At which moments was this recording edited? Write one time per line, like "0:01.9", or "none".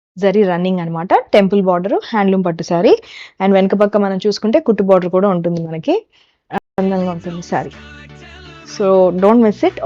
0:06.6